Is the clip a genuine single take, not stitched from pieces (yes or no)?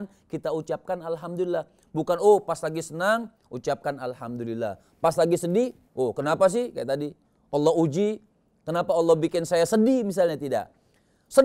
yes